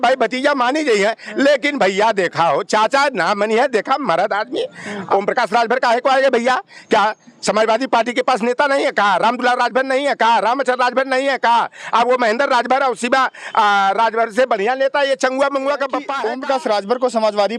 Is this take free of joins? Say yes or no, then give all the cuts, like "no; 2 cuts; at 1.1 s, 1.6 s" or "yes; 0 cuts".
no; 2 cuts; at 5.0 s, 16.1 s